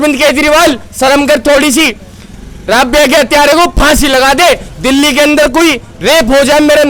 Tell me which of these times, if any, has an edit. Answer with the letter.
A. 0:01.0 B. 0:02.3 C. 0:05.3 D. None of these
D